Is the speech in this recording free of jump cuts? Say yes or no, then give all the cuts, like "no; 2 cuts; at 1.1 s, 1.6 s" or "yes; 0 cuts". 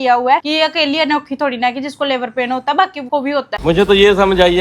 no; 1 cut; at 3.6 s